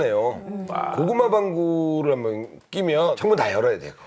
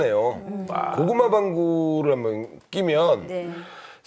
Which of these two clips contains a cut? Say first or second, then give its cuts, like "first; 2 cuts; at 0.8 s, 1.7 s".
first; 1 cut; at 3.2 s